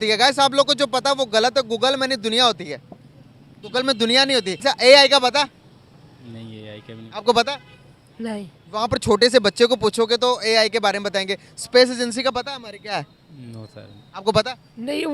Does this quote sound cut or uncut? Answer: cut